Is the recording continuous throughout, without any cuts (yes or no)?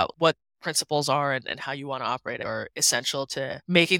yes